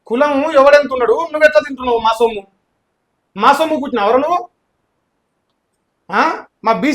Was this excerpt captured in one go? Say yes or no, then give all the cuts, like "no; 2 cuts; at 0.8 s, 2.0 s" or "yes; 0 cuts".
yes; 0 cuts